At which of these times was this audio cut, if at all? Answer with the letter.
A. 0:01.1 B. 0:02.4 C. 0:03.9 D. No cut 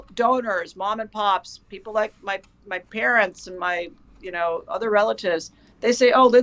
A